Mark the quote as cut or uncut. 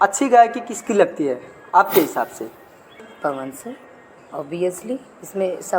cut